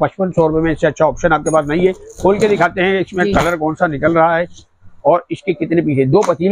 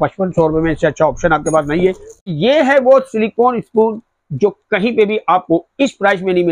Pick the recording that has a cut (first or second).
second